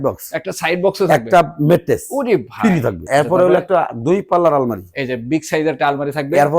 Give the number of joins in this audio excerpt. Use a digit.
1